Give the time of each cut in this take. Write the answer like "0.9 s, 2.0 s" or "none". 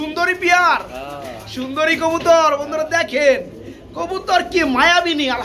none